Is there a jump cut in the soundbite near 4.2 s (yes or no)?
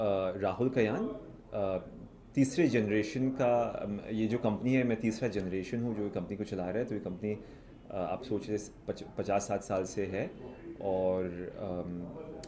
no